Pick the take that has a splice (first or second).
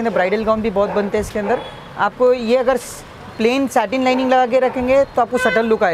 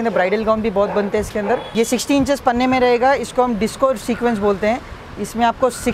second